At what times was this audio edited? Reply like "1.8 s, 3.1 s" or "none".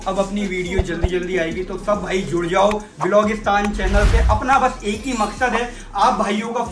none